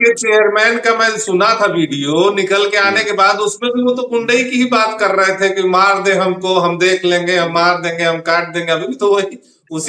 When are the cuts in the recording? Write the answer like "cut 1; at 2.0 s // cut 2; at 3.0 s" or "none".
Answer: none